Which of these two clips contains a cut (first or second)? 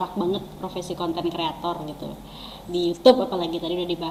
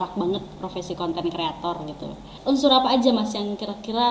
second